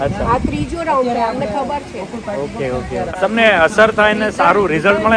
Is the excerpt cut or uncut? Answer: cut